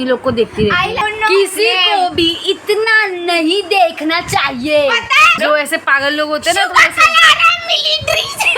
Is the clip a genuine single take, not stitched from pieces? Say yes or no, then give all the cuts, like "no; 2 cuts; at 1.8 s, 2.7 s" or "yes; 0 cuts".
no; 2 cuts; at 1.0 s, 5.4 s